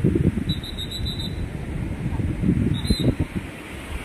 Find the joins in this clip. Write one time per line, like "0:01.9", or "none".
none